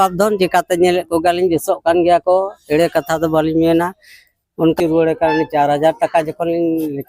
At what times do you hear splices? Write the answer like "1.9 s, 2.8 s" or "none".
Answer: 4.8 s